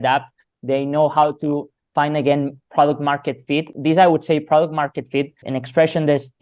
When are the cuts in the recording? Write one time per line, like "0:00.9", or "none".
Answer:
0:03.7
0:05.4

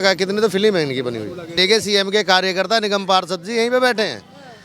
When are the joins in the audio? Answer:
0:01.5

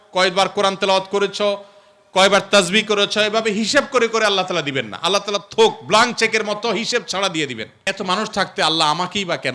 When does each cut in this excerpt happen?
0:07.9

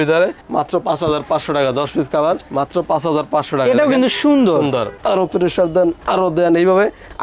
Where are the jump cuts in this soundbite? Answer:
0:04.9

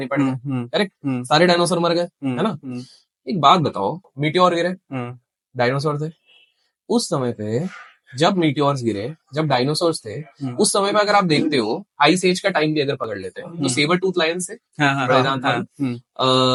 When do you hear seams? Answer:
none

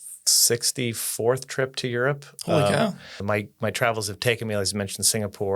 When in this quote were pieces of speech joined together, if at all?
0:03.1

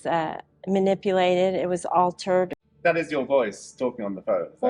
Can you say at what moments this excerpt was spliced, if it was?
0:02.5

